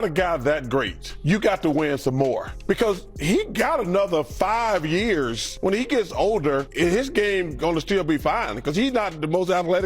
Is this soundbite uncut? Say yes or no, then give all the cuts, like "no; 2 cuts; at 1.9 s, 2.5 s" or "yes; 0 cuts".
no; 4 cuts; at 1.1 s, 2.5 s, 5.5 s, 6.7 s